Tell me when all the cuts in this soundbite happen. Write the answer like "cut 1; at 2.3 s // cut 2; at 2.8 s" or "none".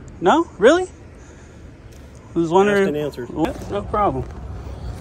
cut 1; at 3.4 s